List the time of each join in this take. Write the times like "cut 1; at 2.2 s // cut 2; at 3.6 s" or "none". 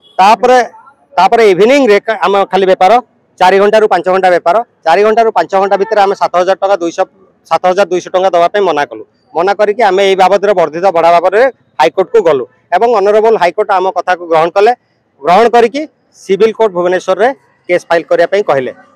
none